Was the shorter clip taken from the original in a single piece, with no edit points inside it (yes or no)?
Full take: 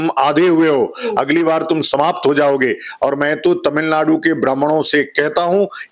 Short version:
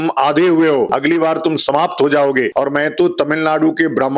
no